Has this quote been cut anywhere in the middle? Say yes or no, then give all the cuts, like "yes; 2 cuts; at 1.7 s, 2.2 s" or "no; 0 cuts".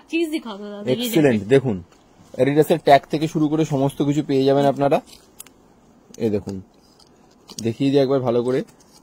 no; 0 cuts